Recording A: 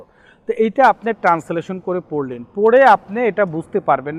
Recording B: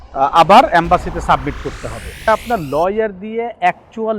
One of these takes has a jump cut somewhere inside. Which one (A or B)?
B